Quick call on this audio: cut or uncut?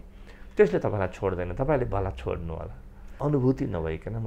cut